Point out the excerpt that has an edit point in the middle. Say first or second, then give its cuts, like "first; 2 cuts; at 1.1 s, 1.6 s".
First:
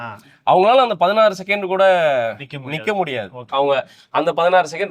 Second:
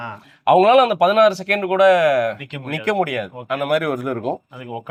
first; 1 cut; at 3.4 s